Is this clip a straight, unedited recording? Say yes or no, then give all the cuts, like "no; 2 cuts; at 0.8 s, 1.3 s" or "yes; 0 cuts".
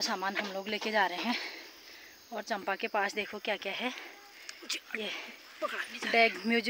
yes; 0 cuts